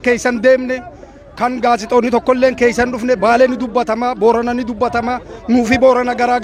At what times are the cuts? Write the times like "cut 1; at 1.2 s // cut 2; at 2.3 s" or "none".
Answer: none